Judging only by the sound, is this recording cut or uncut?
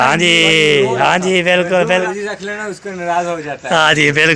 cut